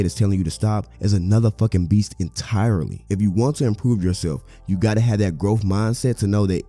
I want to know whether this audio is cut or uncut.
cut